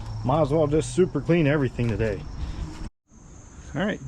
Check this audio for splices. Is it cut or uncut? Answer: cut